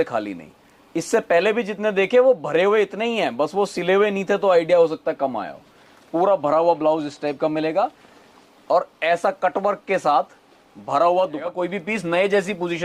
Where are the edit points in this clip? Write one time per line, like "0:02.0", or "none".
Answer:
0:11.6